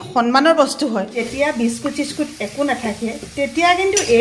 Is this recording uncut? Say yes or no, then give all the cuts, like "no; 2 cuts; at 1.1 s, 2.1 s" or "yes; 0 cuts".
no; 1 cut; at 1.2 s